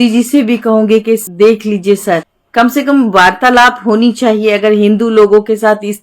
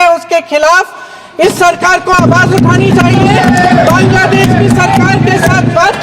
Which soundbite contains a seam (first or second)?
first